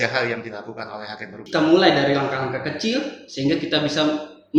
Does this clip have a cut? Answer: yes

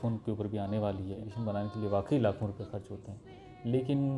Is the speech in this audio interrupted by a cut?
yes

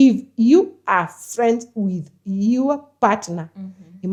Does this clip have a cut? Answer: no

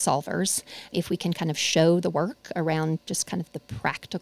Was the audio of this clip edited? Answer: yes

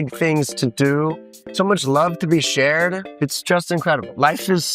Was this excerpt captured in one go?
no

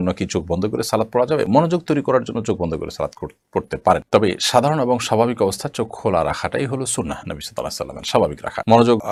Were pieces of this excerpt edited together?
no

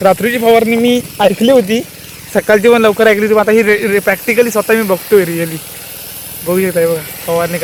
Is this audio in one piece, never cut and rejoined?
yes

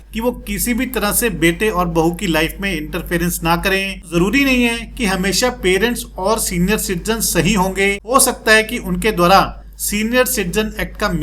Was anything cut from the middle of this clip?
yes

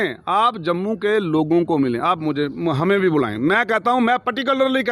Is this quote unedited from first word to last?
yes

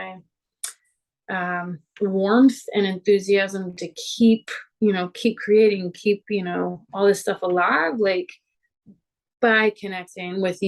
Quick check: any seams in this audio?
no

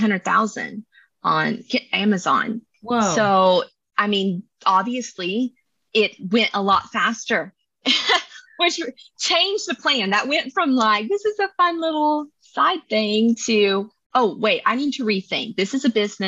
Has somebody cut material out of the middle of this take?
no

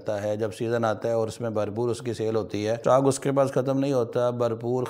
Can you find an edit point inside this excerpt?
yes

